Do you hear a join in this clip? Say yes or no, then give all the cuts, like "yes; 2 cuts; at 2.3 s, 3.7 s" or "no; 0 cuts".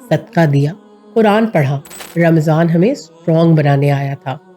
yes; 1 cut; at 2.0 s